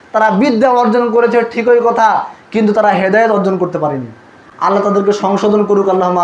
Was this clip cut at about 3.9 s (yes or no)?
no